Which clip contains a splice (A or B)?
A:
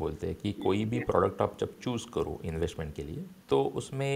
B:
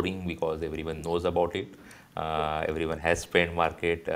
A